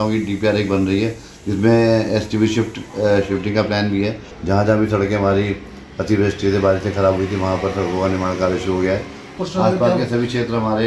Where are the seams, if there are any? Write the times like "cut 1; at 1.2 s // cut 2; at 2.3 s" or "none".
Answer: cut 1; at 4.3 s // cut 2; at 9.3 s